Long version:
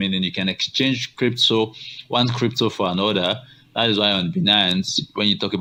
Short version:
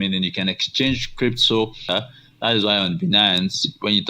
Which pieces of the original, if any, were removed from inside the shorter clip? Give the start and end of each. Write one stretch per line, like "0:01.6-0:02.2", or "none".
0:01.9-0:03.2